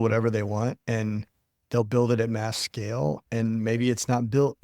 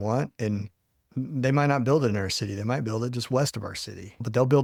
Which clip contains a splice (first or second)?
first